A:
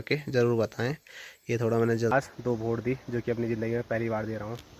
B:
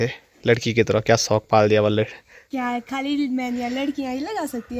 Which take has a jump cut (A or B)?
A